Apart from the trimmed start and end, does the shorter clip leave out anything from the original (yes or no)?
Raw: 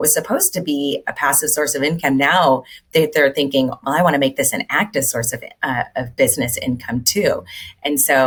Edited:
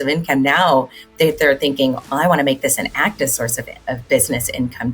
yes